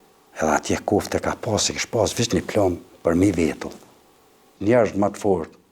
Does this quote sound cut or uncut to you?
cut